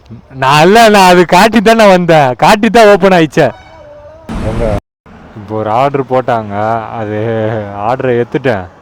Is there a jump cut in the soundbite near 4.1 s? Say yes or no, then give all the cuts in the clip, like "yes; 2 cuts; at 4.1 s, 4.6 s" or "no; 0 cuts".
yes; 1 cut; at 4.1 s